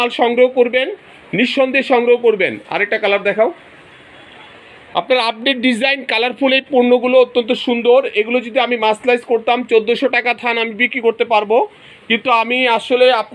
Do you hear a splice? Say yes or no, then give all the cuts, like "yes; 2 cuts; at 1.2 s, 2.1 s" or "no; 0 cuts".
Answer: no; 0 cuts